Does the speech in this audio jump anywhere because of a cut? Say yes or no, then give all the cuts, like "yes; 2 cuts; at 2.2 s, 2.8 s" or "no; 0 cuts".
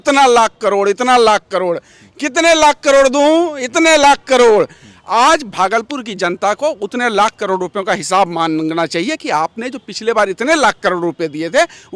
no; 0 cuts